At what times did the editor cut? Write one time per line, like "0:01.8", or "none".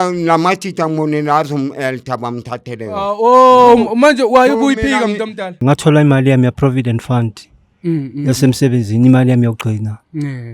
0:05.6